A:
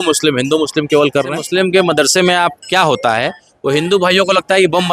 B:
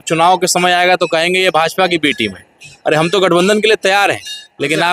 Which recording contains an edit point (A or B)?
A